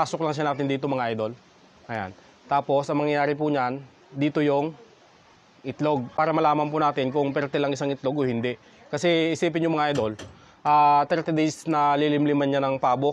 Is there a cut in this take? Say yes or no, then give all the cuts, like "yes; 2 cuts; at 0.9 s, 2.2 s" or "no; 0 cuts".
yes; 1 cut; at 6.1 s